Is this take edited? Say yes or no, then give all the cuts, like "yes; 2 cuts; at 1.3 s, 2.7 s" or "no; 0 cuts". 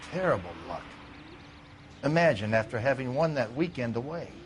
no; 0 cuts